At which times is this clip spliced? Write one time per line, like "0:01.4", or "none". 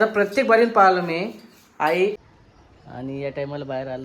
0:02.2